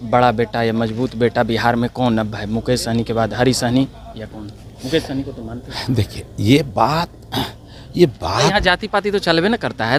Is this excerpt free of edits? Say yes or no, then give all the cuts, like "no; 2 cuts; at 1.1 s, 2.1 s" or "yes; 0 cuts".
yes; 0 cuts